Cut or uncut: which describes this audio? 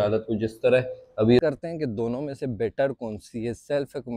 cut